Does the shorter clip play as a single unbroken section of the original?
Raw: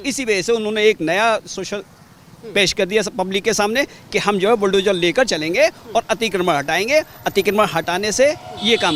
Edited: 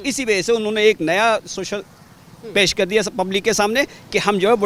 yes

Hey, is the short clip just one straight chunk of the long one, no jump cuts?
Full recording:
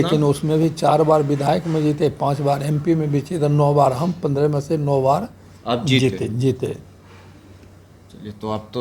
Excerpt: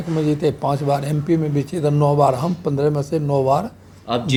yes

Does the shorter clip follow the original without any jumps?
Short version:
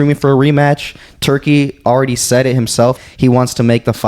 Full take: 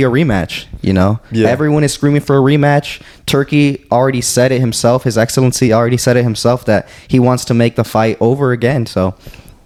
no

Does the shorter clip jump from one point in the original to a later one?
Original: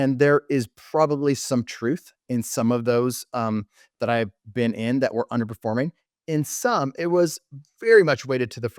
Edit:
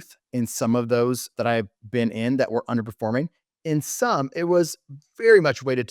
yes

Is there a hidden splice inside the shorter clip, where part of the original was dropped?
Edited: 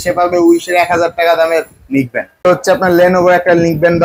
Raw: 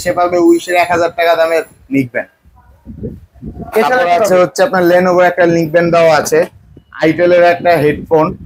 yes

